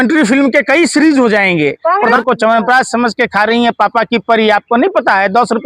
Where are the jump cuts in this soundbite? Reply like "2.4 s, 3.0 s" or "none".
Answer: 2.1 s